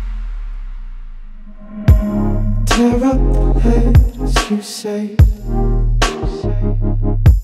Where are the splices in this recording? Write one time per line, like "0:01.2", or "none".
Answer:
0:01.4